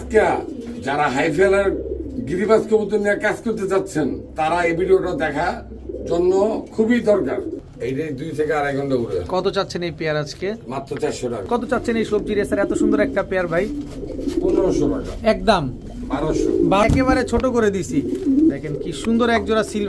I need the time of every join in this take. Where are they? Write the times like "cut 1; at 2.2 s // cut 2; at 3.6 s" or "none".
cut 1; at 7.6 s // cut 2; at 11.5 s // cut 3; at 16.8 s